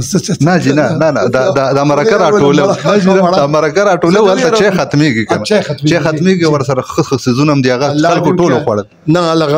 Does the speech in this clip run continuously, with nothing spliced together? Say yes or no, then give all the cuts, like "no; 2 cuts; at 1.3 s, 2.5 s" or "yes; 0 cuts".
yes; 0 cuts